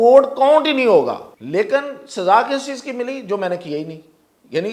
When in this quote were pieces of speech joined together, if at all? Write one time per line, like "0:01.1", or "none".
0:01.3

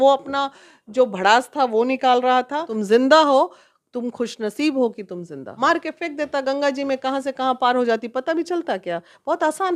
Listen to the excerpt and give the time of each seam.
0:02.7
0:05.4

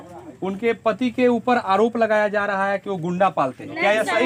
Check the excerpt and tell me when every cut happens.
none

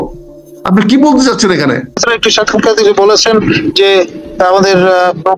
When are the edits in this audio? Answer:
0:01.9

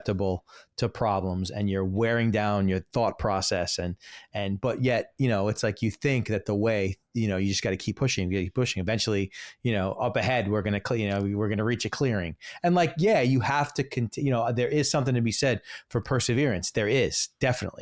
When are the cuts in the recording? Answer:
none

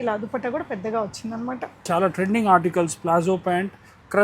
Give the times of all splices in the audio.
0:01.9

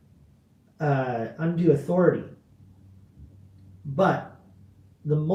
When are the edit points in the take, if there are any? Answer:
none

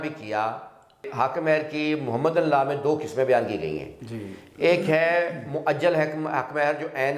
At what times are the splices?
0:01.1

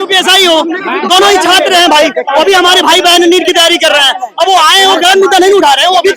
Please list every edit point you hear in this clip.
none

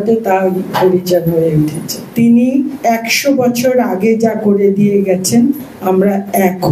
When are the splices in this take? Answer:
0:02.0

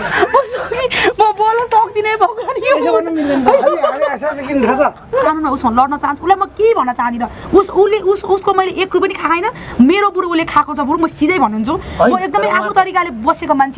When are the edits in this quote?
0:05.3

